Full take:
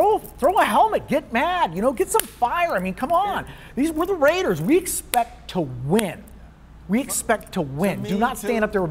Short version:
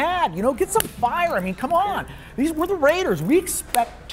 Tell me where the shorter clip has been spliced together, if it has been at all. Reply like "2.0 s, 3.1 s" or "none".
none